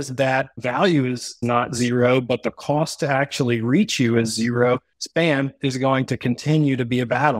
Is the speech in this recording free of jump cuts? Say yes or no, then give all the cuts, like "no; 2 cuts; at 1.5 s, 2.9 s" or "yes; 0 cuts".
no; 1 cut; at 5.0 s